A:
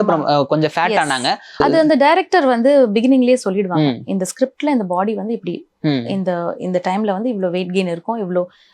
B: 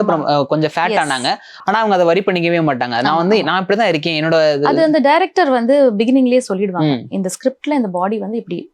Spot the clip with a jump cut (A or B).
A